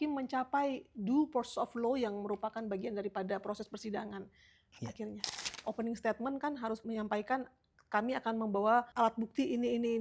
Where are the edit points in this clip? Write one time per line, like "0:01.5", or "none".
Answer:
0:05.6
0:06.8
0:08.9